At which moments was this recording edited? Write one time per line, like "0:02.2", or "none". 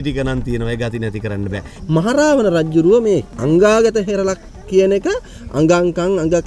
0:01.8
0:03.3